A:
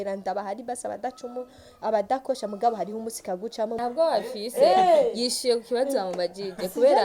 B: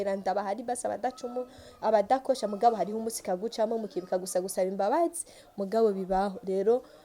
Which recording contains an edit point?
A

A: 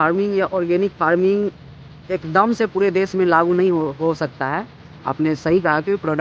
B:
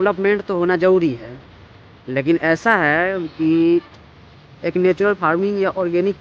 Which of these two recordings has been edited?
B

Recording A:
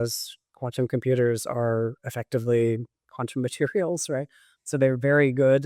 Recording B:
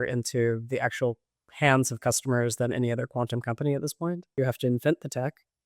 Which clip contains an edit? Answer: B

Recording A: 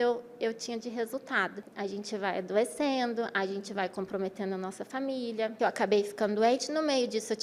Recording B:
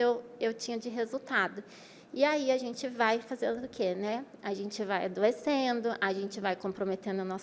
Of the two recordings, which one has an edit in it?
A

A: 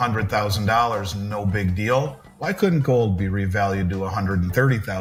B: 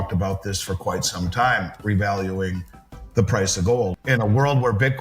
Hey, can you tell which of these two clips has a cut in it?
B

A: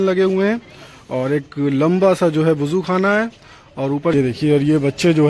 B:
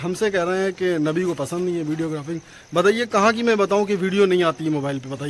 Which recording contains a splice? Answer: A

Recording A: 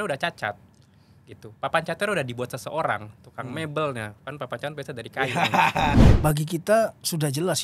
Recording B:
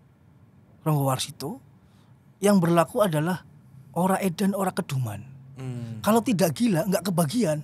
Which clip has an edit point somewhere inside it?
A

